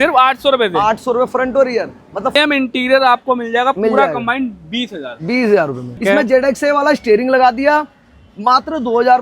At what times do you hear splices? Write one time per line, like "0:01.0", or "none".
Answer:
0:02.4
0:05.9